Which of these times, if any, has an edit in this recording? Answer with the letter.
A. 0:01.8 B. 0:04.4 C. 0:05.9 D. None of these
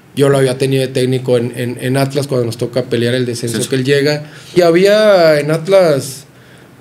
B